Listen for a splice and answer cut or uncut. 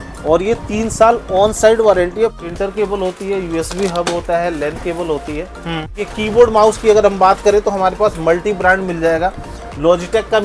cut